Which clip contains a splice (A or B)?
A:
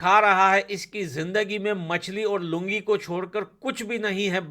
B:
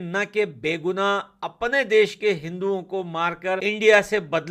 B